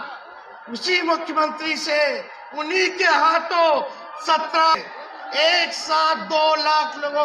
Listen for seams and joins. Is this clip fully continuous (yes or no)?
no